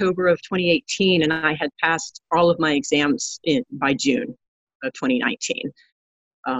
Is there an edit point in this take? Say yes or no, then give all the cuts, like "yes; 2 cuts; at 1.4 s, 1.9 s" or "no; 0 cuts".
no; 0 cuts